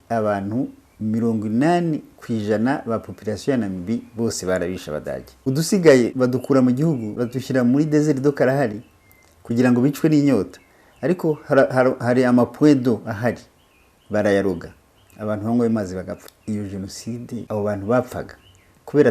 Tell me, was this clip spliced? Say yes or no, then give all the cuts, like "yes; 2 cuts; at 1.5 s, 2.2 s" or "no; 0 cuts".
yes; 5 cuts; at 5.3 s, 6.1 s, 7.2 s, 16.3 s, 17.4 s